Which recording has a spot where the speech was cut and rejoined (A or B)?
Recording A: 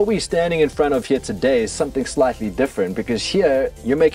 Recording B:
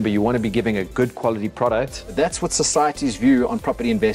B